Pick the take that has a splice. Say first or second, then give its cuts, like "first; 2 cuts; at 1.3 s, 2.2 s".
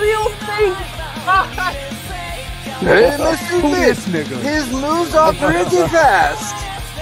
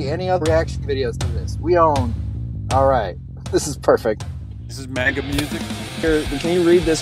second; 1 cut; at 6.0 s